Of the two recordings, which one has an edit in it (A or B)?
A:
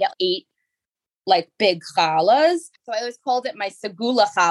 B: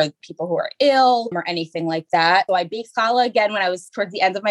A